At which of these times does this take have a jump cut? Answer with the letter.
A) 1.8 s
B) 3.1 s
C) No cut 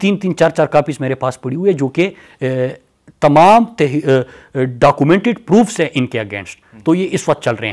C